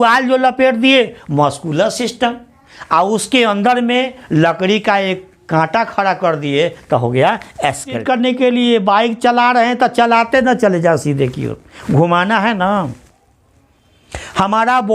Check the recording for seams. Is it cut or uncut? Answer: cut